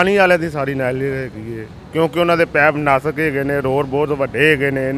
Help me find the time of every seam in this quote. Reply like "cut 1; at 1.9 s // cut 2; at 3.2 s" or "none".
none

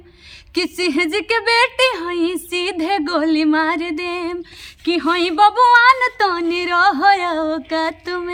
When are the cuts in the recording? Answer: none

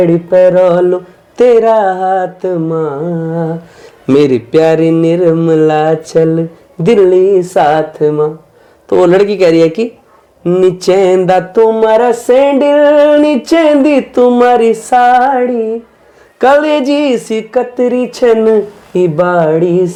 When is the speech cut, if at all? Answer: none

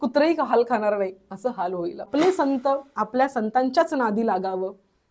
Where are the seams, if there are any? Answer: cut 1; at 2.1 s

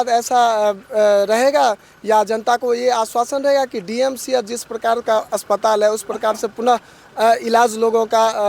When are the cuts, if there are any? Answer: none

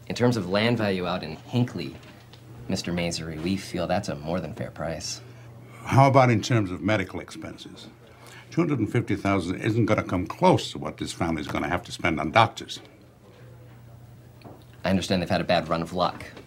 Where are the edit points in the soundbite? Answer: cut 1; at 13.9 s

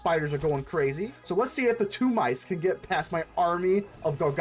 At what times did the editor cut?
cut 1; at 1.1 s

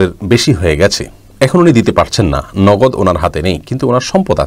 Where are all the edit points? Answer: none

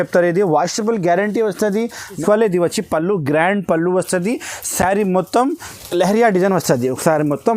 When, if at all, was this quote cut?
cut 1; at 2.2 s // cut 2; at 5.7 s

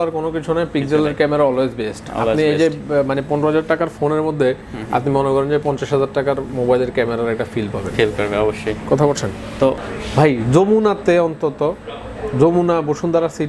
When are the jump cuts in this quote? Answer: cut 1; at 9.9 s

